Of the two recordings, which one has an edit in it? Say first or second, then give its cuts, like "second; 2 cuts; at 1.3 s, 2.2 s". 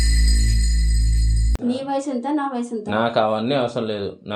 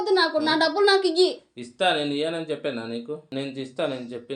first; 1 cut; at 1.6 s